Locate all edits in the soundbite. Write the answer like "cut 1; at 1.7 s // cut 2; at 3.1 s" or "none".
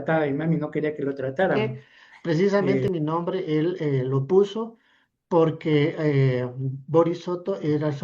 cut 1; at 1.6 s